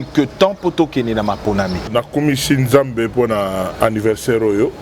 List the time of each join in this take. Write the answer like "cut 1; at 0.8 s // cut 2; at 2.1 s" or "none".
cut 1; at 1.9 s